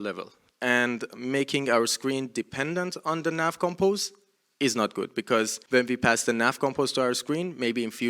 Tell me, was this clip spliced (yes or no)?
yes